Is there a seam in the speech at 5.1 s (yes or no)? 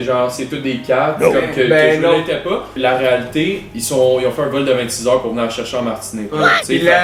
no